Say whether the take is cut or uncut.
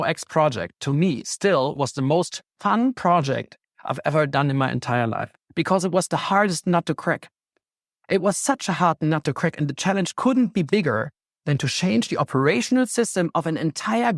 uncut